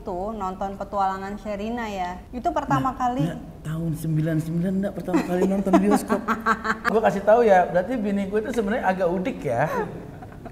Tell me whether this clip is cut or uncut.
cut